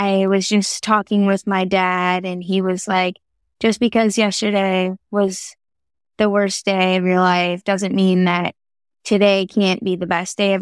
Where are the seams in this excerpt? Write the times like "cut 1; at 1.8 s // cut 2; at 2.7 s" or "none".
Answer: none